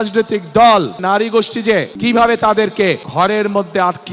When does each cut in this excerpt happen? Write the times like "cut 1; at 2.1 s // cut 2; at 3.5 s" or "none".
cut 1; at 1.0 s // cut 2; at 1.9 s // cut 3; at 3.1 s

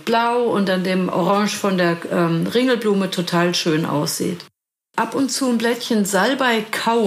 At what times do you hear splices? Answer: cut 1; at 4.8 s

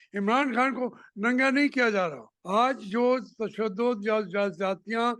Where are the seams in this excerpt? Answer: cut 1; at 2.3 s

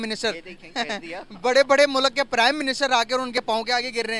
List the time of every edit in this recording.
none

